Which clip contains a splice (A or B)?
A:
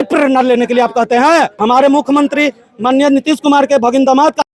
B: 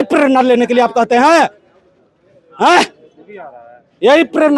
A